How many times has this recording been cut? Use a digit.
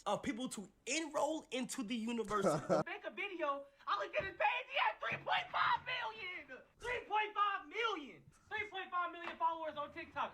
1